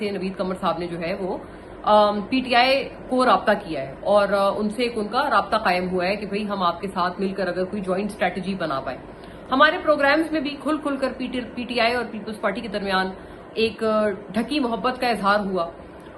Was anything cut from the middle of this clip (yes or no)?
no